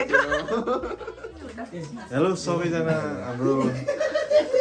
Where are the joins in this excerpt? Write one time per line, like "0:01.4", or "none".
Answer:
0:01.6